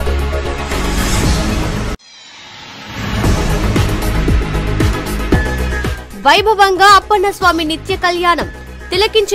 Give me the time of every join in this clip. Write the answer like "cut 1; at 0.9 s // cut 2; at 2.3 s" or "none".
cut 1; at 1.9 s // cut 2; at 4.4 s